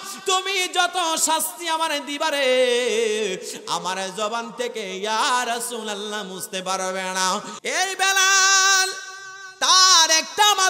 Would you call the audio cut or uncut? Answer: cut